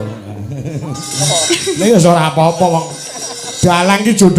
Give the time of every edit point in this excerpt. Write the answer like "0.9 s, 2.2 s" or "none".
1.1 s